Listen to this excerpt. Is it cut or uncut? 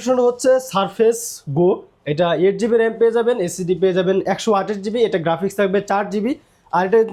uncut